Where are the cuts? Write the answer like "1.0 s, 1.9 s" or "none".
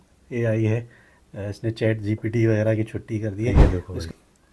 3.5 s